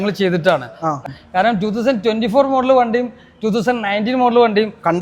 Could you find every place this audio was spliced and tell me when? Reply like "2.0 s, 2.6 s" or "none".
1.0 s